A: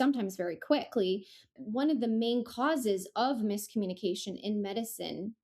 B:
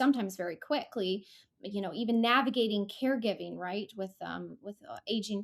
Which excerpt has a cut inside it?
A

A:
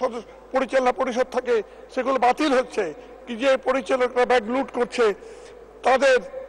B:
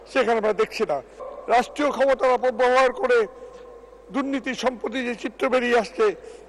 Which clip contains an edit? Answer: B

